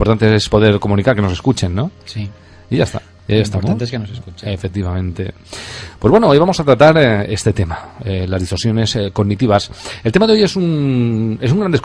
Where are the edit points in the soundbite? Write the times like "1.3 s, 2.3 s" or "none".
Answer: 7.0 s